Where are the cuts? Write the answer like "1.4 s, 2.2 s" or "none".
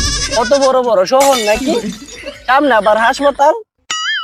none